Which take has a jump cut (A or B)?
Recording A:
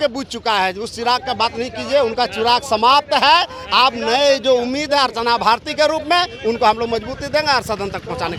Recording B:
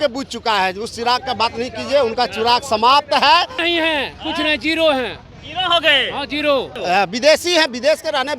B